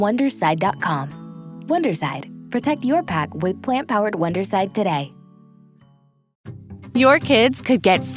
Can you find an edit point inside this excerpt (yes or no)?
yes